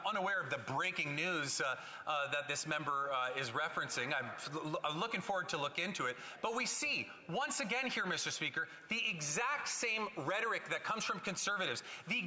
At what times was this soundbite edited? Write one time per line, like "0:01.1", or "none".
none